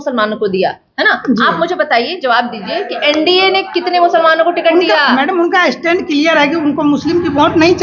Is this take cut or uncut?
uncut